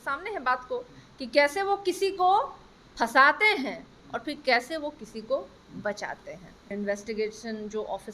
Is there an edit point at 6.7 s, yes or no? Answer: yes